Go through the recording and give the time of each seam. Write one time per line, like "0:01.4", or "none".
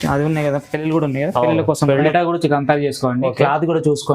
0:02.1